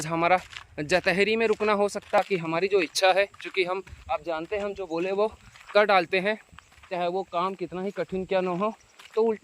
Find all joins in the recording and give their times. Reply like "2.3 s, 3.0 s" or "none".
2.2 s